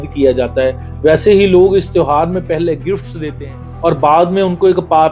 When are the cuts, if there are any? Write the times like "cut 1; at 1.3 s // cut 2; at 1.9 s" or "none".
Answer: cut 1; at 3.6 s